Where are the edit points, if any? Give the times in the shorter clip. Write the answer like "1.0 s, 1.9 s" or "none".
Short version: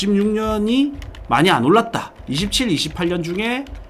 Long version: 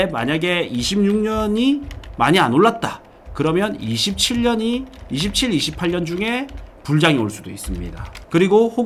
2.2 s